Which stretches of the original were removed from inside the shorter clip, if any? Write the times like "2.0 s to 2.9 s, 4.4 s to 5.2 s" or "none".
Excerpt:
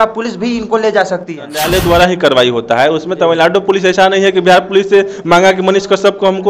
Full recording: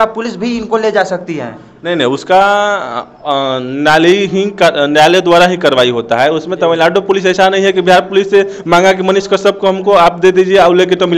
1.6 s to 5.0 s